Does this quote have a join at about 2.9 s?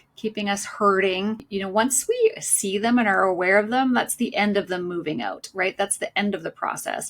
no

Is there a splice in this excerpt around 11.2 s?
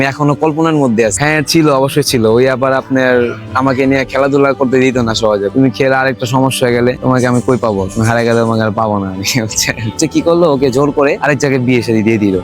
yes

